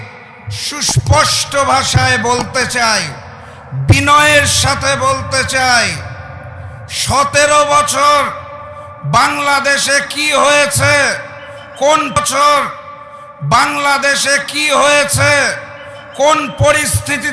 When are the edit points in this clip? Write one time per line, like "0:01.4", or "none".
0:12.2